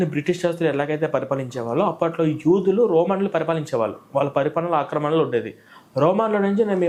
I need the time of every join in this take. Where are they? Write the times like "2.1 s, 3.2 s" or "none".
none